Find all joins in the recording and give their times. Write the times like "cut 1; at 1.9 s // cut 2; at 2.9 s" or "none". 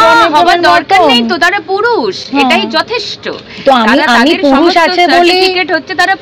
none